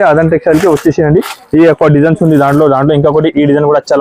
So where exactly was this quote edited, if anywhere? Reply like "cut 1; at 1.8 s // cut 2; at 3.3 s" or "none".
none